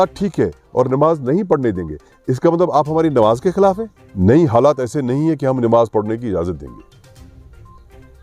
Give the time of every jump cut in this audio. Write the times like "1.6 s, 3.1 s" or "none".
4.1 s